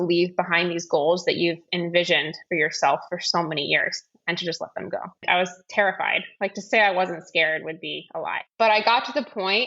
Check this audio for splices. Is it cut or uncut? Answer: cut